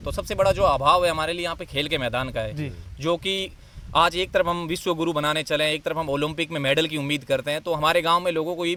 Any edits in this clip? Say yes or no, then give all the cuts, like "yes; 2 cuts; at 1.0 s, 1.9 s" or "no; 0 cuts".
no; 0 cuts